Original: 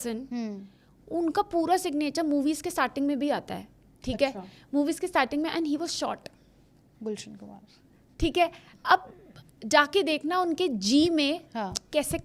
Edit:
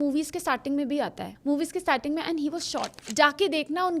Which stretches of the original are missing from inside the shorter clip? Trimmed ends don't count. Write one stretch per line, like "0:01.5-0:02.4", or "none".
0:03.6-0:04.5
0:06.3-0:09.5

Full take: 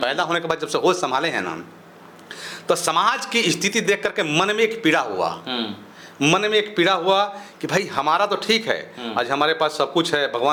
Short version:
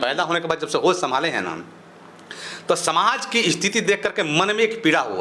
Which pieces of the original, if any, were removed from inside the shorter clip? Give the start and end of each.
none

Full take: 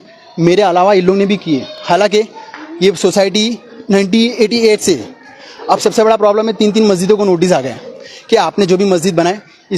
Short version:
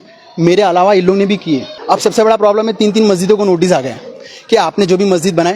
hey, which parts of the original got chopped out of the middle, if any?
0:01.7-0:05.5

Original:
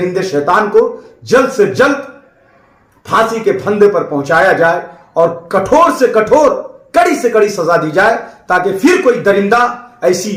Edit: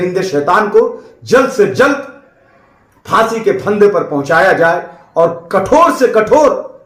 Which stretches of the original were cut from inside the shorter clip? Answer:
none

